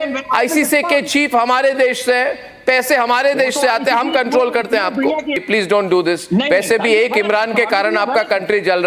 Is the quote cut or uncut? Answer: cut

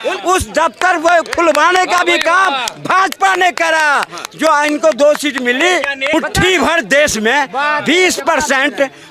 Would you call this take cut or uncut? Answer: cut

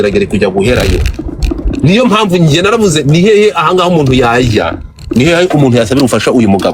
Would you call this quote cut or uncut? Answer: uncut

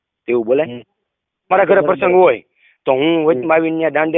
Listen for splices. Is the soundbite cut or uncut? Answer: cut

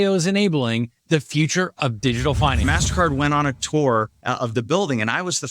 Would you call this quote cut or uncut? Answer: cut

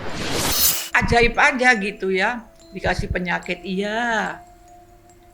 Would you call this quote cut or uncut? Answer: uncut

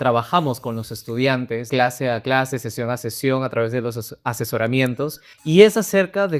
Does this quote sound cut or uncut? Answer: cut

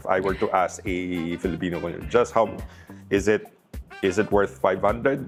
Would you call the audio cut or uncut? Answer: uncut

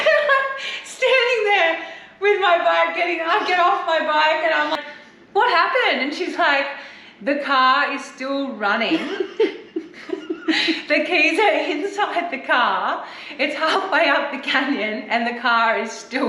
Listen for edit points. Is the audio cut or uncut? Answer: cut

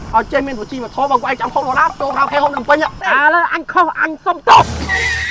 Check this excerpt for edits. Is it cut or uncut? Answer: cut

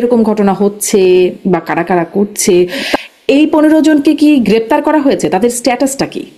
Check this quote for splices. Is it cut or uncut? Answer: cut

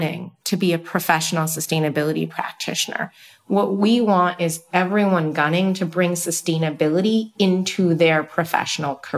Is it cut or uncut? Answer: uncut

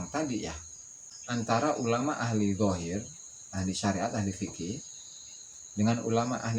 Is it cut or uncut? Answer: cut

